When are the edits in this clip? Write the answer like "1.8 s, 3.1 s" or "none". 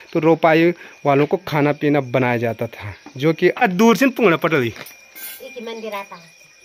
3.6 s

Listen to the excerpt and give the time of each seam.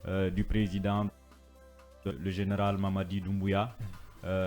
none

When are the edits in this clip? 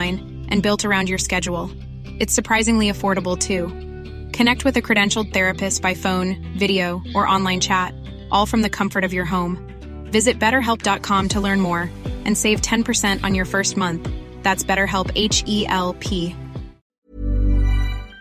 16.9 s

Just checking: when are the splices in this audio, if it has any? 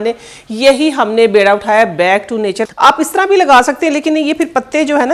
2.6 s

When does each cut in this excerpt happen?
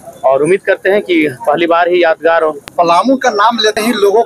2.6 s

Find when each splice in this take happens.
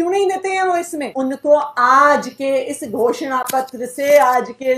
1.0 s

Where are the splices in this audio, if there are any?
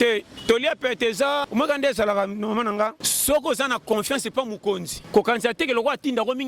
1.5 s, 3.1 s, 4.9 s

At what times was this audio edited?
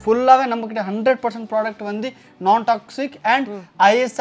none

